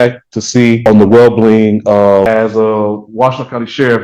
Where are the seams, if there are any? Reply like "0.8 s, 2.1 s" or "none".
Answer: 0.8 s, 2.3 s